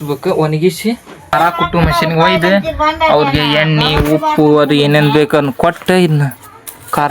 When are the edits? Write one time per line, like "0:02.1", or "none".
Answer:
0:01.3